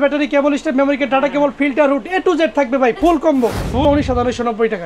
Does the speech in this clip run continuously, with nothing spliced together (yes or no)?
no